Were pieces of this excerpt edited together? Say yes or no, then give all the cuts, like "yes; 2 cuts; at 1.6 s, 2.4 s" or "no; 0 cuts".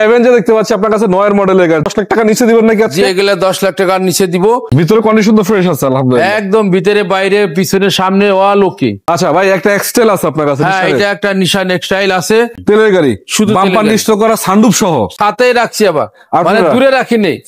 yes; 5 cuts; at 1.9 s, 4.7 s, 9.0 s, 12.6 s, 15.1 s